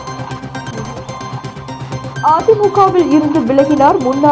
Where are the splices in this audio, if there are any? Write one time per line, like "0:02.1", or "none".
0:02.0